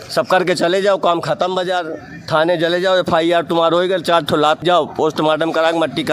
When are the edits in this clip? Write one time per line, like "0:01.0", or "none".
0:04.6